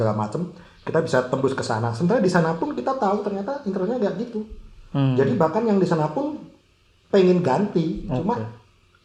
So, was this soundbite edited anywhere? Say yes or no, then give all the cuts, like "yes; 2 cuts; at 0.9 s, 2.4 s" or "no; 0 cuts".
no; 0 cuts